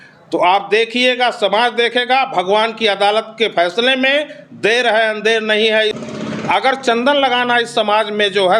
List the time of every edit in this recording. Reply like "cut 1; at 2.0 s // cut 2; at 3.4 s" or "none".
cut 1; at 6.0 s

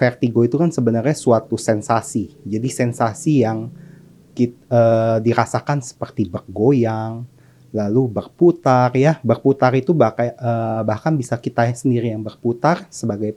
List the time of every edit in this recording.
none

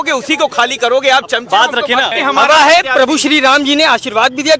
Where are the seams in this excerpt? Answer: cut 1; at 2.1 s

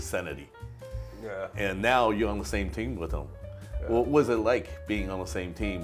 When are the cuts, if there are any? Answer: none

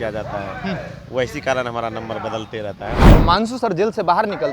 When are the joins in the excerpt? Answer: cut 1; at 3.0 s

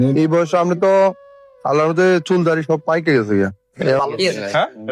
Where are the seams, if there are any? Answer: cut 1; at 4.0 s

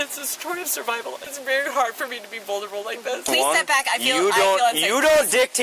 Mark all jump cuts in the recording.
cut 1; at 1.3 s // cut 2; at 3.3 s

